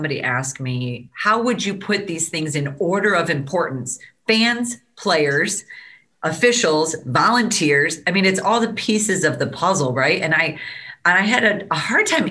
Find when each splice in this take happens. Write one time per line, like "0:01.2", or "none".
0:01.1